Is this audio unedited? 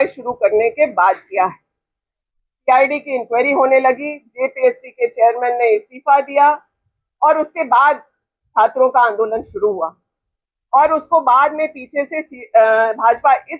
yes; 0 cuts

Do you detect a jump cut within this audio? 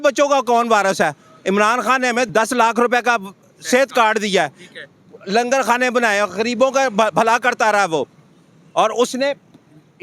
yes; 1 cut; at 2.3 s

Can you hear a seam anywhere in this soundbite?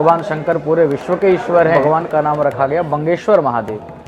yes; 1 cut; at 1.8 s

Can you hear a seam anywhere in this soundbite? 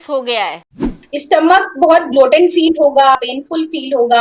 yes; 2 cuts; at 1.0 s, 3.3 s

